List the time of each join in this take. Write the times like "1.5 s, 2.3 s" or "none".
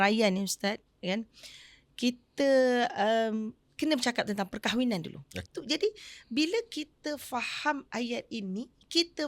5.5 s

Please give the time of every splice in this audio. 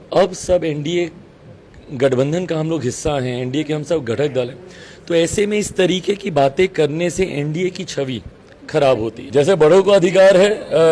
9.2 s

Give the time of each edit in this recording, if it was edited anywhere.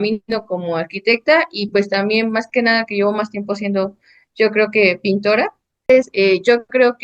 5.9 s

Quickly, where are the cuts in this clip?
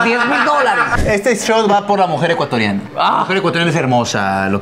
1.0 s, 2.9 s

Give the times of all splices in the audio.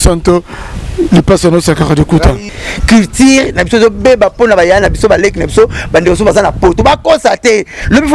2.5 s

